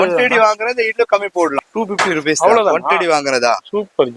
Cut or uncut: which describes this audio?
cut